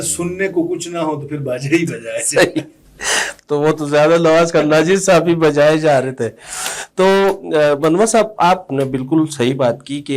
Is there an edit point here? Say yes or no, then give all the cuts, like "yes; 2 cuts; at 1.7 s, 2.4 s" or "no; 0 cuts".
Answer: no; 0 cuts